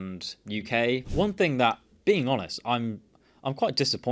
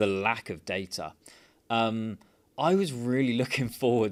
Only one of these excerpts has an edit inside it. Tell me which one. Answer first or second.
first